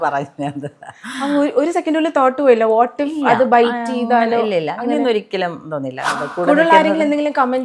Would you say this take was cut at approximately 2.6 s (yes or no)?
no